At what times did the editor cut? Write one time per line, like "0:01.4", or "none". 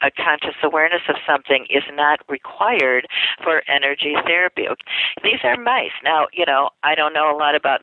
0:04.8